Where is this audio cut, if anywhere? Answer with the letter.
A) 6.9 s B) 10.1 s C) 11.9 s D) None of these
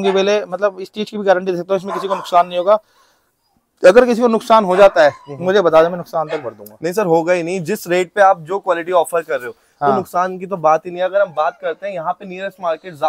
D